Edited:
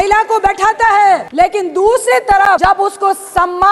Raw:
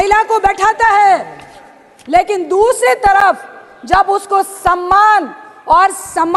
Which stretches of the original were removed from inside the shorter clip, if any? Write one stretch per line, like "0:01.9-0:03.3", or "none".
0:01.3-0:02.0
0:03.3-0:03.9